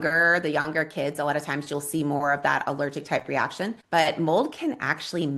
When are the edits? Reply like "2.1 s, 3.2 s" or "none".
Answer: 3.8 s